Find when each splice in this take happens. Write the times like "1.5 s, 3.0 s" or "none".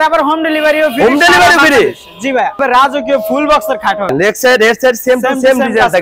2.6 s, 4.1 s